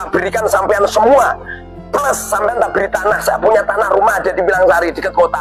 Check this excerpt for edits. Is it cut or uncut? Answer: uncut